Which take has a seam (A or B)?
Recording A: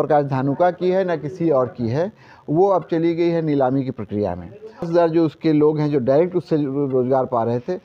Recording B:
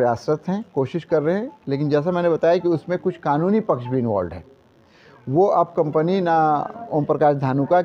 A